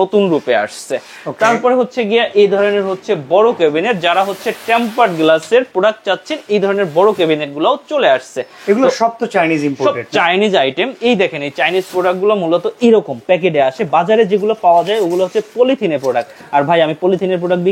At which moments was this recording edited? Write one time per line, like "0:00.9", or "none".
none

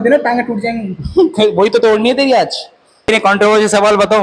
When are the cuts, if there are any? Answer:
0:03.1

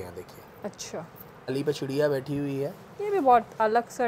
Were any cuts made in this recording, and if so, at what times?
0:01.5

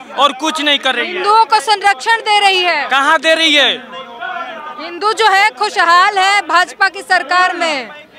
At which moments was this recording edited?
none

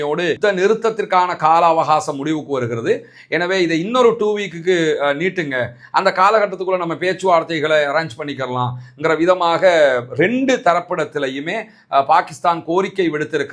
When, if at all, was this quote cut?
none

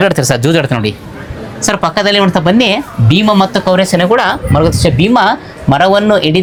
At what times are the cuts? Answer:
none

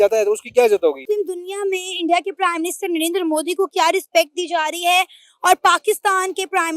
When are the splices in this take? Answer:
0:01.0

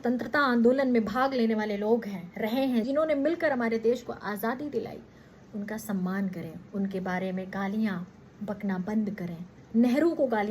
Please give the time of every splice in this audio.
0:02.7
0:09.5

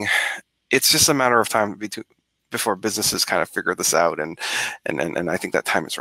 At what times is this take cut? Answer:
none

